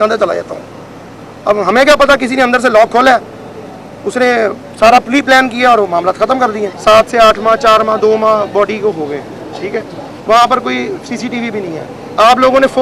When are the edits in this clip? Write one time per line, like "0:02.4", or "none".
0:06.7